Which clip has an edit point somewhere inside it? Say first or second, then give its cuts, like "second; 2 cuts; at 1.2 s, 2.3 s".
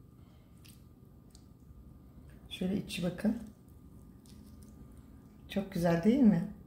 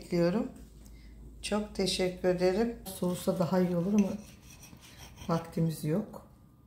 second; 1 cut; at 2.9 s